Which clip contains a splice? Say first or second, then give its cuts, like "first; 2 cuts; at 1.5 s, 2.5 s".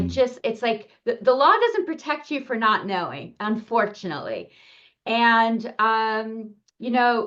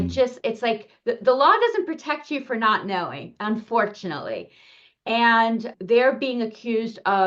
second; 1 cut; at 5.7 s